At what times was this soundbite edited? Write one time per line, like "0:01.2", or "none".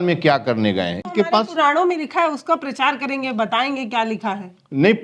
0:01.1

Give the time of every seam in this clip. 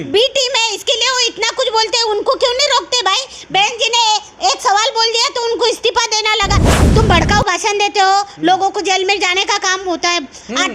0:06.7

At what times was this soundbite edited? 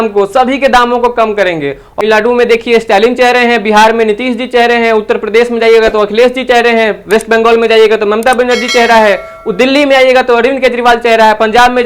0:02.0

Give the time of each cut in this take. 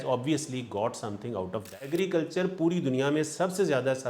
0:01.6

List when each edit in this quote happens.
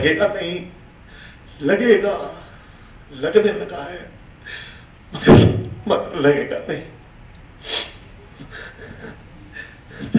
none

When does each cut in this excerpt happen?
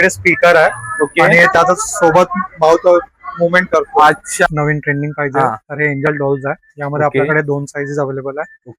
0:04.4

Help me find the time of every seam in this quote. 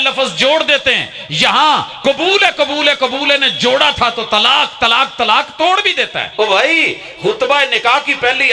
0:06.2

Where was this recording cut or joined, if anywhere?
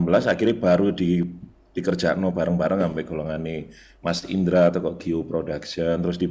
none

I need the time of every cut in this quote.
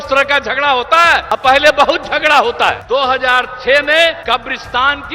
0:01.2
0:02.8
0:04.2

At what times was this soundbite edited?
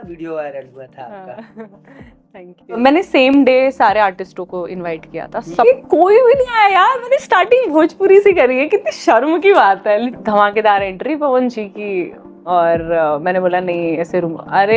0:02.8
0:05.6
0:10.1

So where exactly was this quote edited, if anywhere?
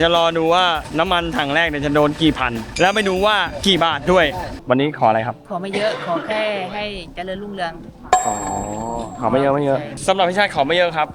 0:04.5

